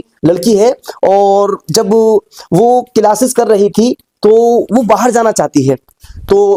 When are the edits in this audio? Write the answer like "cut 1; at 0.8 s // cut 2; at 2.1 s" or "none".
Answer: none